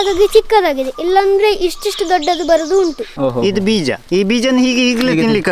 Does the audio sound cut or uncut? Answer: cut